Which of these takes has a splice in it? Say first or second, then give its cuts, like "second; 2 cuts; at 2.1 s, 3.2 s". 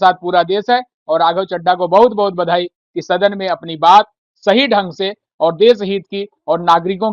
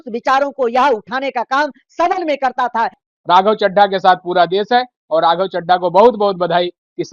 second; 1 cut; at 3.0 s